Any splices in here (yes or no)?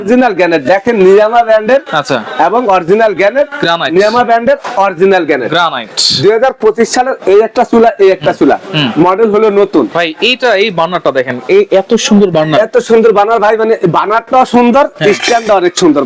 no